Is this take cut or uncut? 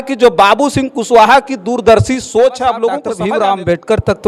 cut